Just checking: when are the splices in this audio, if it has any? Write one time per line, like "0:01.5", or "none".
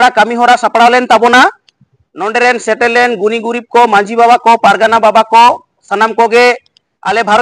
0:05.9